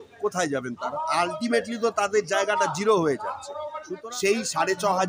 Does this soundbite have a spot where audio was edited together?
yes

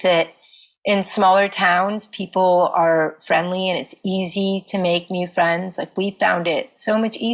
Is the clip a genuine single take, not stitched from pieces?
yes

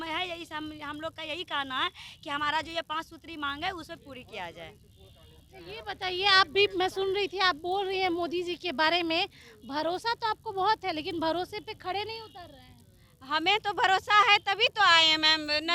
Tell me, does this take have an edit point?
no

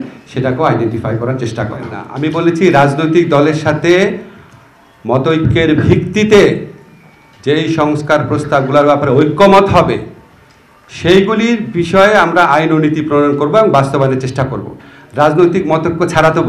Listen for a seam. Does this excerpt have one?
yes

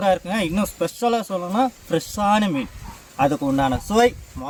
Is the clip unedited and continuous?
yes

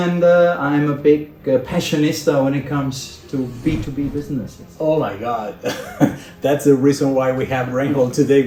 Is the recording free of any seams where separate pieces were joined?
yes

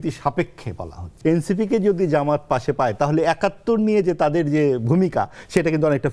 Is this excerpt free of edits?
no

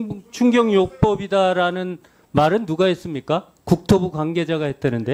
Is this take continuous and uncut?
yes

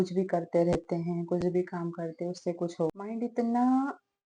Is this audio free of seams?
no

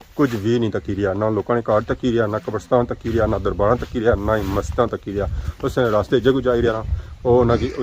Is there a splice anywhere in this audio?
no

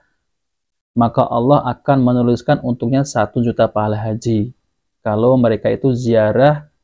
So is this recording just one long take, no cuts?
yes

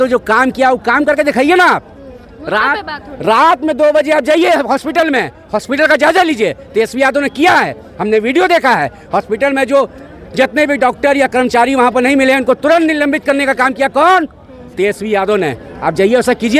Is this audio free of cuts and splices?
yes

